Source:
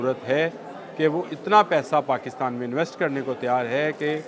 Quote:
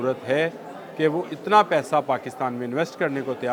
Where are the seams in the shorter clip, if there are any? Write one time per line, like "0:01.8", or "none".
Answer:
none